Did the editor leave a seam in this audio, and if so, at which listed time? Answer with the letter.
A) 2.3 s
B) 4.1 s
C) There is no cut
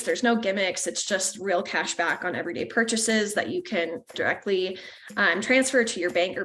B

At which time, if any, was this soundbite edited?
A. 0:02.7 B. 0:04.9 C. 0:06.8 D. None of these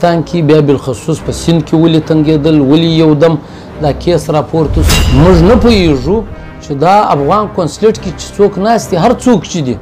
B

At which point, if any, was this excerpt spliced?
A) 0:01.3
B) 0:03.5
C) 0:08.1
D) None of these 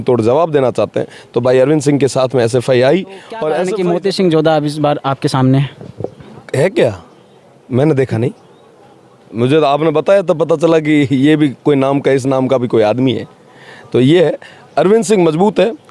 B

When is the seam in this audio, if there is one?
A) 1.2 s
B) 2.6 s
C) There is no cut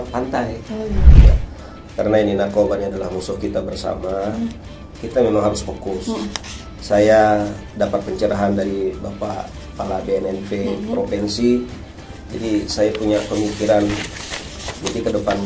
A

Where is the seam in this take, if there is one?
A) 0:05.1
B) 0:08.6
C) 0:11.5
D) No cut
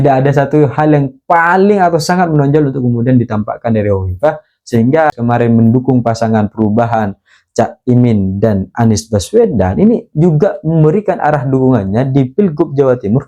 A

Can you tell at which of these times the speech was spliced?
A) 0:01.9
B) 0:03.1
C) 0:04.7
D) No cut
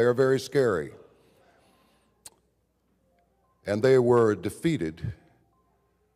D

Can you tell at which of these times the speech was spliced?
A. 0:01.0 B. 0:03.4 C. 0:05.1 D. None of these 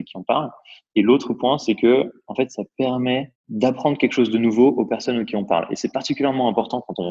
B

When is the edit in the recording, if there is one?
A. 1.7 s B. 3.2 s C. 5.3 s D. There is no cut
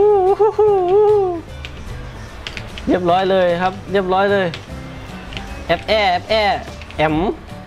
D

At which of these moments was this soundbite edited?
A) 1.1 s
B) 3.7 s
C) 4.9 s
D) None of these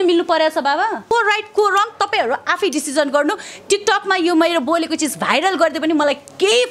A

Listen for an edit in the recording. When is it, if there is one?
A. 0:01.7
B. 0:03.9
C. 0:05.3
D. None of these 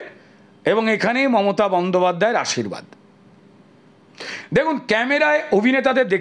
D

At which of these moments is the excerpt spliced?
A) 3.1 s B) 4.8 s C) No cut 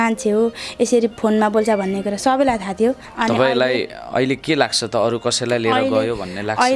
A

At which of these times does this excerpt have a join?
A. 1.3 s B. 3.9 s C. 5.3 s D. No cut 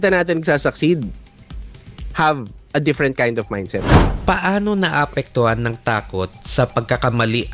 B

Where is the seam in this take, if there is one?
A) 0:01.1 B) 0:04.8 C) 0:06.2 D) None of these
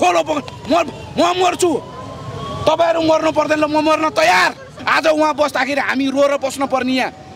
B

